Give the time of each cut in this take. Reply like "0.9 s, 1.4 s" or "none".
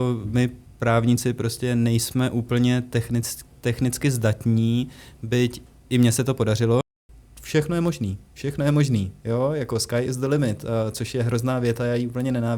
6.9 s